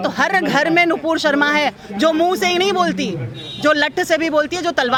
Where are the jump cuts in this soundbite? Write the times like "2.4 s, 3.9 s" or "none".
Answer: none